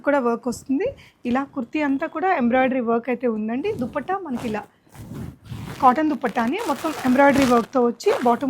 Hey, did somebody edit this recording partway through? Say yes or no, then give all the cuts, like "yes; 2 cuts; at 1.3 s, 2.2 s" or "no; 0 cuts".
no; 0 cuts